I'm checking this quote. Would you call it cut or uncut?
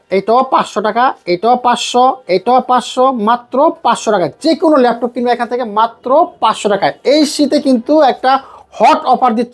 uncut